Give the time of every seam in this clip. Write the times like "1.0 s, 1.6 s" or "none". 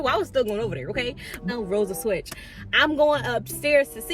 1.4 s